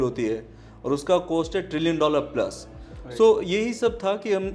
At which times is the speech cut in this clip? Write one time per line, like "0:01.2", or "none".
none

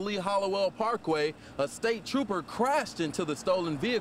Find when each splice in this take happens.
none

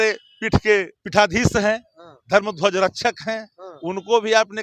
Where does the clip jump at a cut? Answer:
0:01.0

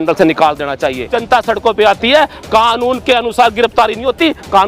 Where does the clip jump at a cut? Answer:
0:01.1

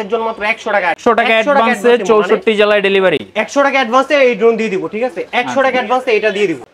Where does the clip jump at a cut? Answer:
none

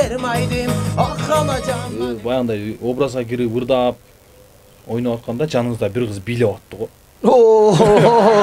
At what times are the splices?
0:01.9

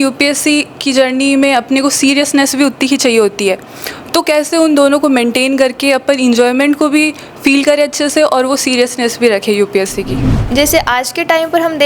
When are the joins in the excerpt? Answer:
0:10.3

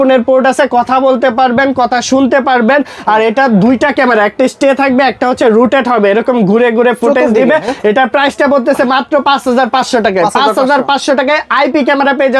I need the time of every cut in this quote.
none

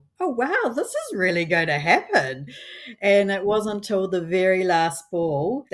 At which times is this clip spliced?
none

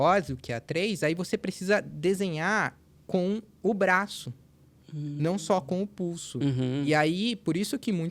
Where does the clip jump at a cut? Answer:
none

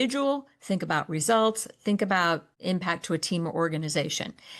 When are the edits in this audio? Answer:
0:02.5

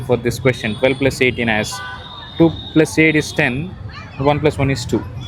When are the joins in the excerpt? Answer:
none

